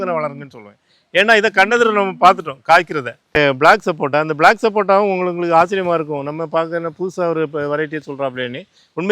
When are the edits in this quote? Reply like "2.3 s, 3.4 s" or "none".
3.4 s